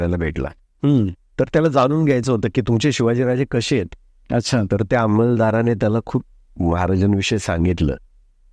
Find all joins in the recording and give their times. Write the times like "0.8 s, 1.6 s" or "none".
2.6 s